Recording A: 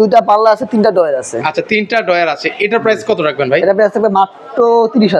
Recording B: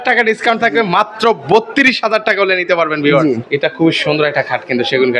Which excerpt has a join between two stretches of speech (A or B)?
B